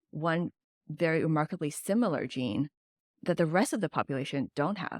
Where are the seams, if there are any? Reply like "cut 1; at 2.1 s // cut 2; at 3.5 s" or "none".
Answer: cut 1; at 3.0 s